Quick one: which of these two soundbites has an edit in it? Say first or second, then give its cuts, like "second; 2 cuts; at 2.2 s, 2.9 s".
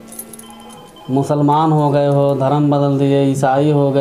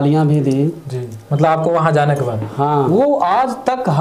second; 1 cut; at 2.9 s